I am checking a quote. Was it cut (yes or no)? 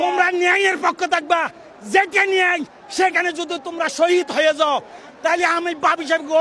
no